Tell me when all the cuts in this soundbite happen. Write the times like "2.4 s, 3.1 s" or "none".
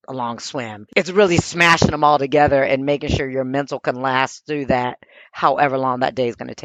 none